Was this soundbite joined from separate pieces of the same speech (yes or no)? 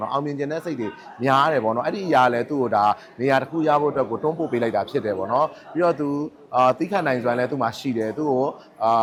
no